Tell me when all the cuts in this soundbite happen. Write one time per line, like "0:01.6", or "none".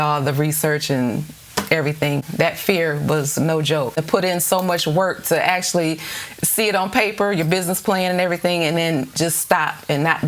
0:02.2
0:03.9

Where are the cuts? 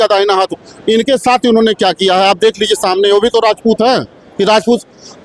none

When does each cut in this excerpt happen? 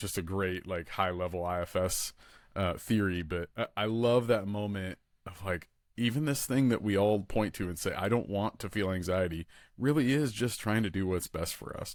none

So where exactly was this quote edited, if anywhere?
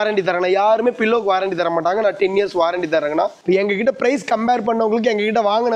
0:03.4

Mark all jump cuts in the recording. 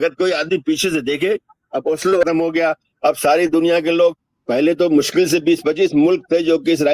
0:02.2

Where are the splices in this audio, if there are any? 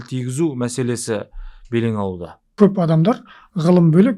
0:02.4

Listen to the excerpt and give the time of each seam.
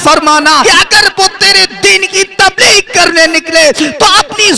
none

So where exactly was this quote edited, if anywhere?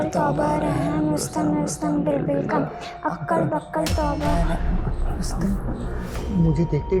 none

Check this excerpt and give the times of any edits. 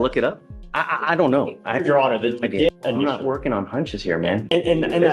0:02.7

